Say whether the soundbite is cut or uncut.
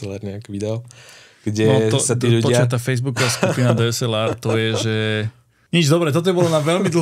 uncut